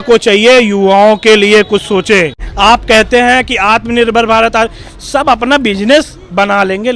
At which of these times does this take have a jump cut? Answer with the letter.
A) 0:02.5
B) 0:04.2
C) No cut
A